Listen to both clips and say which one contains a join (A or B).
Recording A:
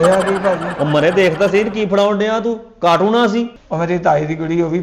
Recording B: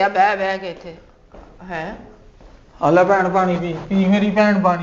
A